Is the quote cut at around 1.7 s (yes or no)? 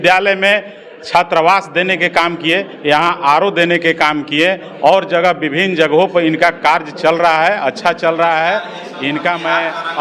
no